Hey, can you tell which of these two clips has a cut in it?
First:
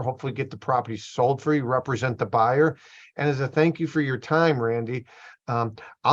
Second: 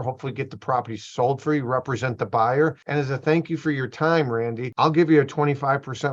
second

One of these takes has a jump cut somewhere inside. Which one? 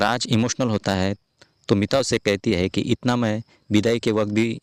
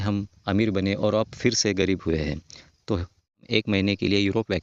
second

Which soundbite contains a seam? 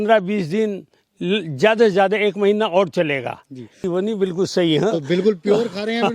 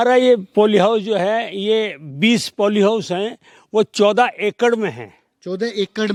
first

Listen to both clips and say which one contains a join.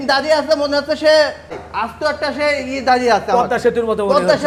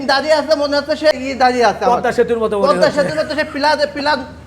second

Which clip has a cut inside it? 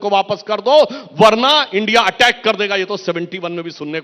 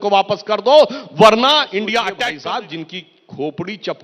second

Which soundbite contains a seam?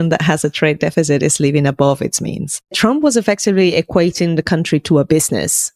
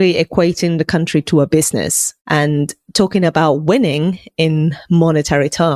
first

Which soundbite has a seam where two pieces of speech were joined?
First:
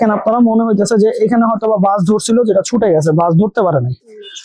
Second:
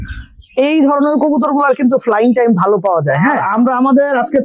second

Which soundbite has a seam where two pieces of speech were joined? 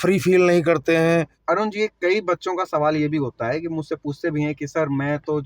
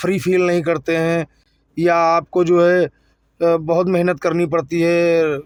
first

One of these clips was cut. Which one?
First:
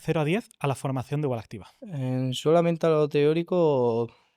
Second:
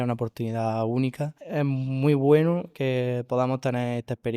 second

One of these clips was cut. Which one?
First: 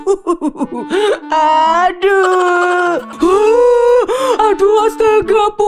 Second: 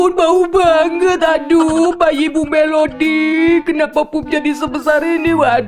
first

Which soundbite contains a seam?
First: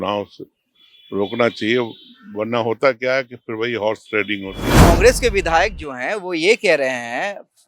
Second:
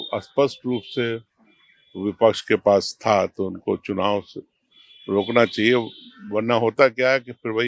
first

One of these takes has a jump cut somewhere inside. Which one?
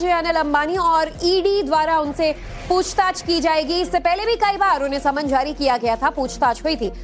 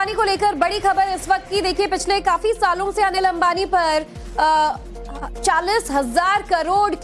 second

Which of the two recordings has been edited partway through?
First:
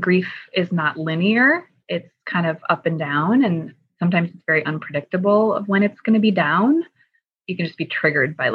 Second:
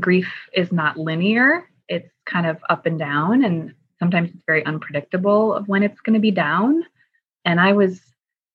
second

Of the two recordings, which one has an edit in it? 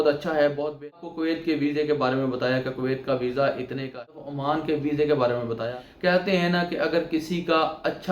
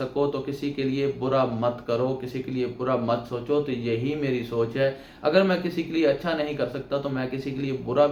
first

